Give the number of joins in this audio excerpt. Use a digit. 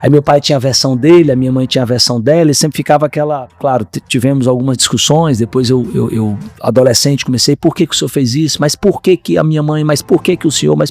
1